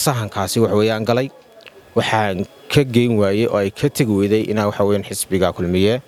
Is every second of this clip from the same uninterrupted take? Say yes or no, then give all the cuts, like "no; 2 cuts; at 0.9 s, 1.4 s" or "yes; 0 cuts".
yes; 0 cuts